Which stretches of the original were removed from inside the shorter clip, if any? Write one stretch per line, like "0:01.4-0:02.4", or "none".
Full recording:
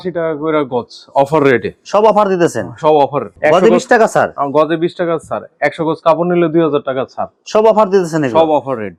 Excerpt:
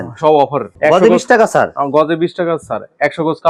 none